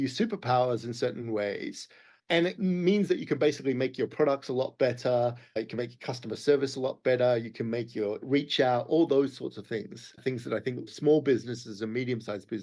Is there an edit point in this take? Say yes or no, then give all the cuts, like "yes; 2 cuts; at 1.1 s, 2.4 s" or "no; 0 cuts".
yes; 5 cuts; at 2.3 s, 5.5 s, 8.2 s, 10.1 s, 10.9 s